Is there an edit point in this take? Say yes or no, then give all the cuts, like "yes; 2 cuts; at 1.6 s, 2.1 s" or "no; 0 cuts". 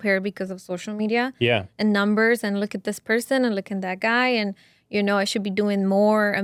no; 0 cuts